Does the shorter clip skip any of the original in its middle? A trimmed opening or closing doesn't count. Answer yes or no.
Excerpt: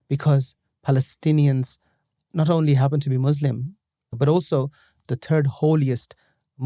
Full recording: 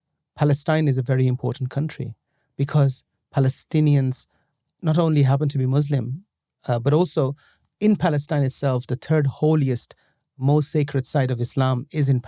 yes